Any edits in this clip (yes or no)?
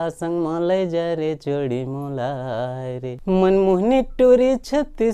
yes